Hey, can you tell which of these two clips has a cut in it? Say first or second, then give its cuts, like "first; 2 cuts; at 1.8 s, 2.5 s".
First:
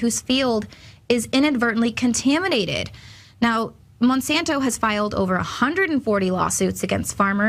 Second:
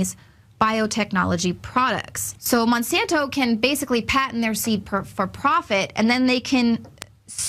first; 1 cut; at 1.4 s